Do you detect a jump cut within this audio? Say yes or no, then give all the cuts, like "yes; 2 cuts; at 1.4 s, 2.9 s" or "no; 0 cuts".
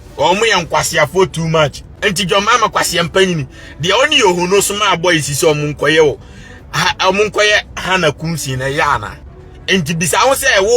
yes; 1 cut; at 1.9 s